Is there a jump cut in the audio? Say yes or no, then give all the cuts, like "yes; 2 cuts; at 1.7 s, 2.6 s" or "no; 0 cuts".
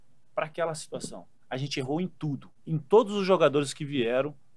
yes; 2 cuts; at 1.3 s, 2.5 s